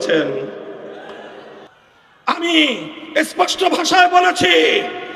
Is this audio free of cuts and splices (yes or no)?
no